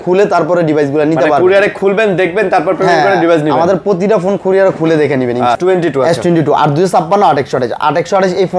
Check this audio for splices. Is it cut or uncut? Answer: cut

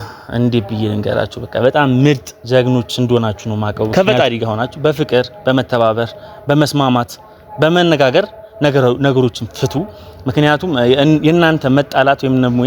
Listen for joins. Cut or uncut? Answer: cut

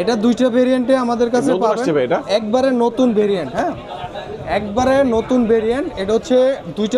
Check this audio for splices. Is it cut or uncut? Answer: uncut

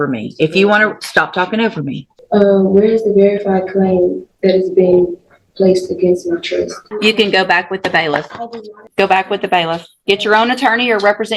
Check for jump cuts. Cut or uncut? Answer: cut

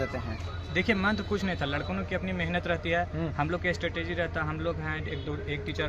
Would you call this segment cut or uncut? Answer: uncut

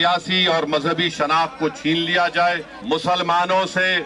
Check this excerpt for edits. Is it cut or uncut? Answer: cut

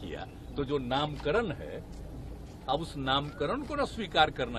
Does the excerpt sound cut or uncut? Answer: uncut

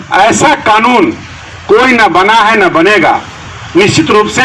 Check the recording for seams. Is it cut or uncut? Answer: uncut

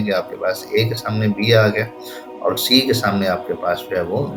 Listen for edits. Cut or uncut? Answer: uncut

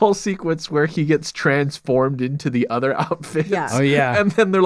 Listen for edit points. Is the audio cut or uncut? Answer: cut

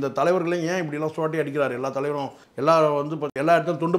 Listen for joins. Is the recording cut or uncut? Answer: uncut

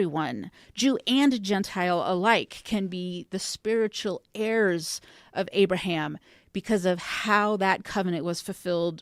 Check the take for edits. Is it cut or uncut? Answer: uncut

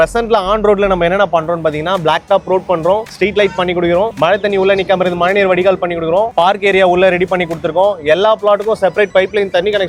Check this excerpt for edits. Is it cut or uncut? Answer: uncut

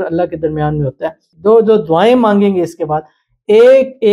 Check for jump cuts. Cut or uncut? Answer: cut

